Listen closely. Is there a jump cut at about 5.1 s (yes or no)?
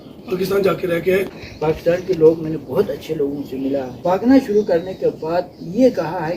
no